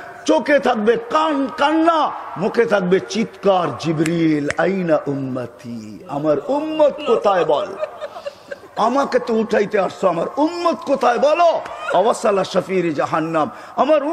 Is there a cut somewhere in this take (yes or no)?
no